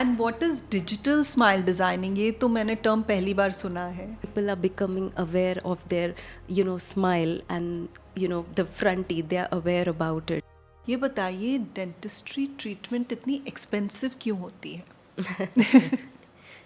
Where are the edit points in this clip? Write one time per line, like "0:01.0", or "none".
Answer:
0:04.3
0:10.4

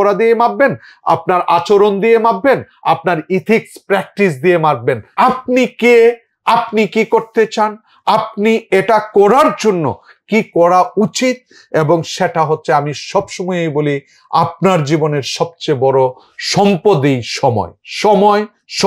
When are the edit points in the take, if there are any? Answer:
0:05.1

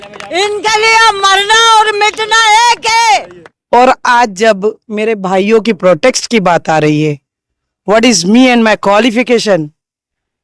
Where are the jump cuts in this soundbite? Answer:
0:03.3

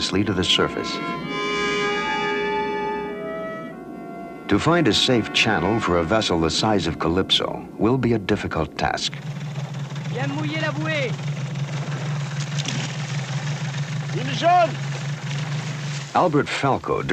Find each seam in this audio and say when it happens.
0:09.6

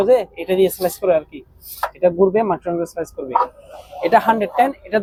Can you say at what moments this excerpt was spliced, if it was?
none

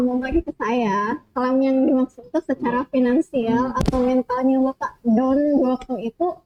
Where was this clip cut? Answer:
none

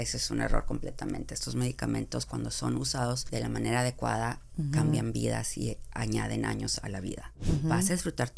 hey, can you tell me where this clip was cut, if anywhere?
0:03.2
0:07.3

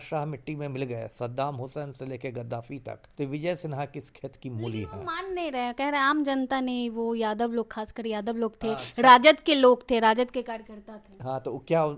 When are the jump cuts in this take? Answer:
0:03.0

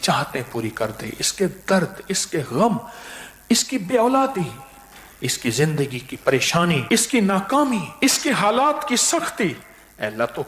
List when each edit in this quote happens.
0:06.8
0:07.9

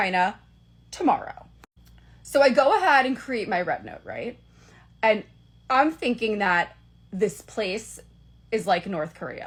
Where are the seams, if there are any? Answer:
none

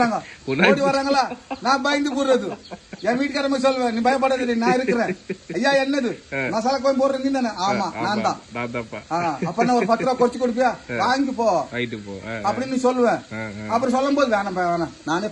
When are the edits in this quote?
none

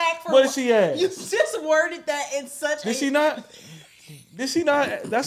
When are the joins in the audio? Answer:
none

